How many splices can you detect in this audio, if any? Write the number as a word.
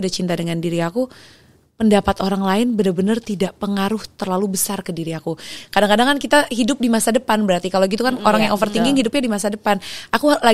one